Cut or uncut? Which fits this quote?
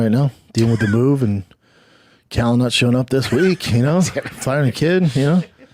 uncut